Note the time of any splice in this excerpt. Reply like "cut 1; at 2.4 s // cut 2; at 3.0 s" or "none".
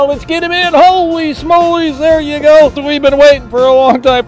cut 1; at 2.9 s